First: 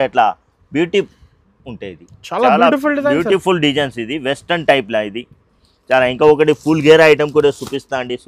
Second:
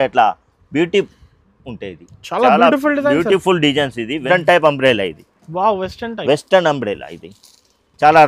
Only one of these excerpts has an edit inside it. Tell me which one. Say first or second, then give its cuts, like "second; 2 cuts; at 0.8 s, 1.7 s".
second; 1 cut; at 4.2 s